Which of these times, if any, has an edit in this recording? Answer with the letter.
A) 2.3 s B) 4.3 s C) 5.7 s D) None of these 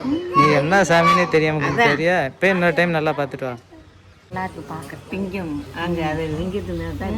B